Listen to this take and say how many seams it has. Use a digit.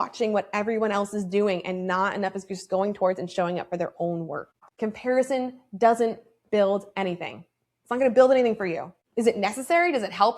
1